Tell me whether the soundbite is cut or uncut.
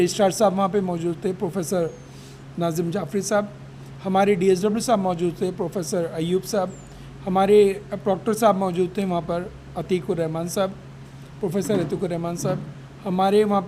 uncut